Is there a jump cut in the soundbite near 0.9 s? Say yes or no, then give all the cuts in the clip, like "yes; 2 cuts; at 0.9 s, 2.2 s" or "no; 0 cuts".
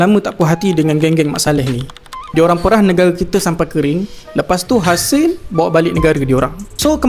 no; 0 cuts